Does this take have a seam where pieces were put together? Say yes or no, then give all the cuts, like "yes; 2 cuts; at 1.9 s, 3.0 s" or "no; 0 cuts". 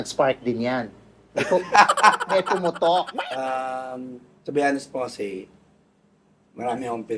yes; 1 cut; at 3.2 s